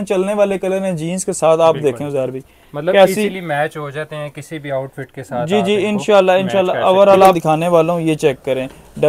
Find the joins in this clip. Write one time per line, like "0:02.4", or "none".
0:07.4